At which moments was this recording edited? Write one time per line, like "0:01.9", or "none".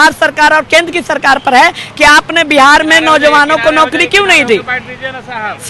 none